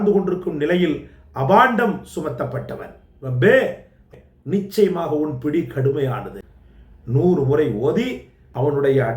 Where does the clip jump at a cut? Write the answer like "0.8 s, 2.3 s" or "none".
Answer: 4.1 s, 6.3 s, 8.2 s